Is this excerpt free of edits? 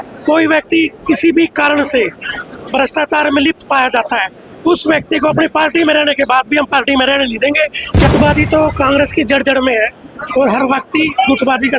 no; 1 cut; at 8.1 s

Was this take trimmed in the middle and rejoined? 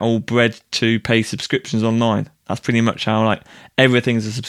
no; 0 cuts

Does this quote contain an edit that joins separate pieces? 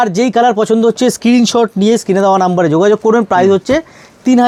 no; 0 cuts

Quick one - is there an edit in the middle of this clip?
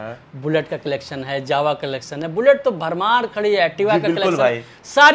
no; 0 cuts

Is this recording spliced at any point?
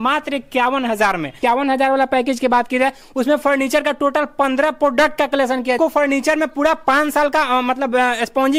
yes; 2 cuts; at 1.4 s, 5.8 s

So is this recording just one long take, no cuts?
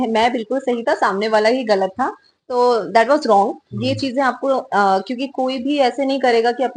yes; 0 cuts

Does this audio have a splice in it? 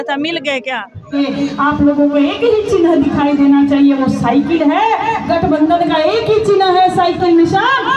yes; 1 cut; at 1.2 s

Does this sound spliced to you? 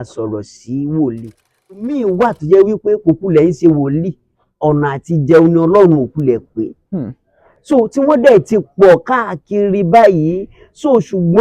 yes; 1 cut; at 1.7 s

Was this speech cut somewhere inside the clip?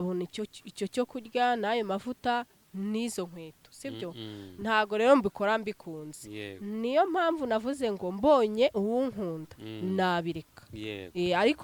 no; 0 cuts

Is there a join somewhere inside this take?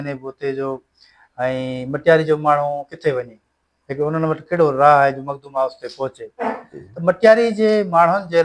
no; 0 cuts

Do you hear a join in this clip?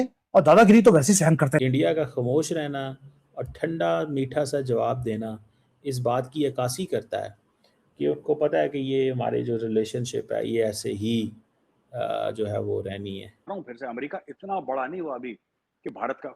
yes; 2 cuts; at 1.6 s, 13.5 s

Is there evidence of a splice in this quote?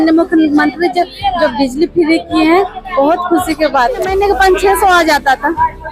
yes; 1 cut; at 4.1 s

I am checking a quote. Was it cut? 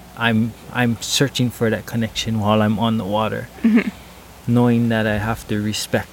no; 0 cuts

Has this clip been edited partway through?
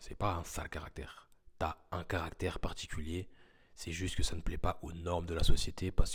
no; 0 cuts

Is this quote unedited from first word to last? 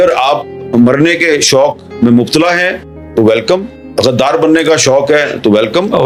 yes; 0 cuts

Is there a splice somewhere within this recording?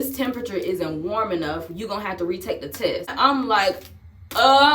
yes; 1 cut; at 3.1 s

